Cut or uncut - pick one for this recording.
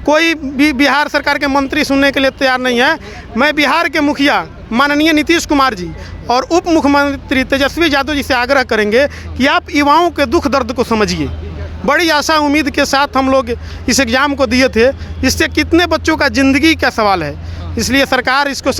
uncut